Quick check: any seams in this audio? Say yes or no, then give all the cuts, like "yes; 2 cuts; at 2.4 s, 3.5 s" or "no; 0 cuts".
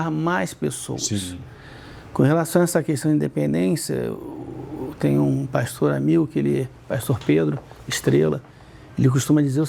no; 0 cuts